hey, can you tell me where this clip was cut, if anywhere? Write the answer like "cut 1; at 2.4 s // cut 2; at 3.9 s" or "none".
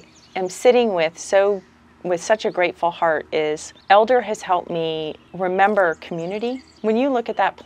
cut 1; at 3.7 s // cut 2; at 5.2 s // cut 3; at 6.7 s